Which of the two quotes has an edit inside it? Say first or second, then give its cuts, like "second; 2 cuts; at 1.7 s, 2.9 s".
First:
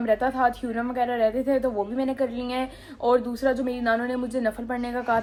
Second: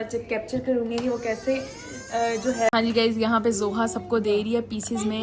second; 1 cut; at 2.7 s